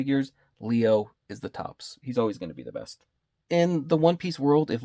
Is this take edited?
yes; 1 cut; at 3.4 s

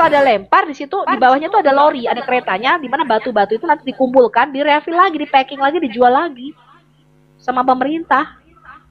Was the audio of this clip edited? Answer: no; 0 cuts

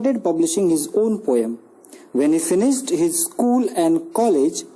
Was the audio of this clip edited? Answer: no; 0 cuts

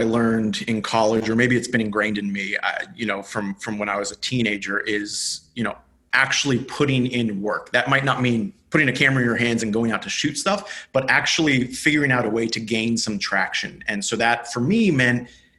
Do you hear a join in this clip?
yes; 1 cut; at 1.2 s

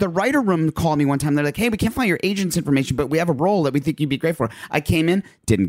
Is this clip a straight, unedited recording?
yes; 0 cuts

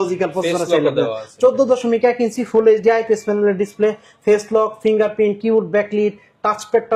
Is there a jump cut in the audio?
no; 0 cuts

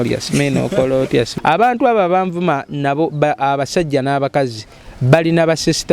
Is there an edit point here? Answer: yes; 1 cut; at 1.3 s

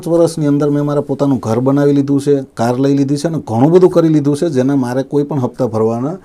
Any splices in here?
no; 0 cuts

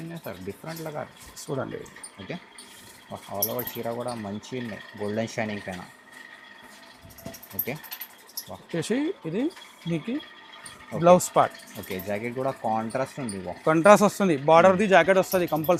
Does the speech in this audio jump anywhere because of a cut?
no; 0 cuts

